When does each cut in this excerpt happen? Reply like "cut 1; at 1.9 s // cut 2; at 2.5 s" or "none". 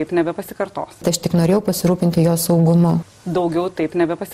cut 1; at 0.9 s // cut 2; at 3.0 s